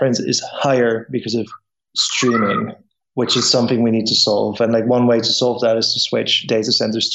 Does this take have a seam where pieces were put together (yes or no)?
no